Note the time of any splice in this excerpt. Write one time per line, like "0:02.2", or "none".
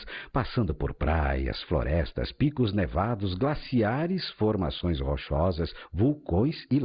0:04.3